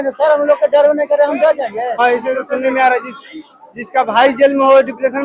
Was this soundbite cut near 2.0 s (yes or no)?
yes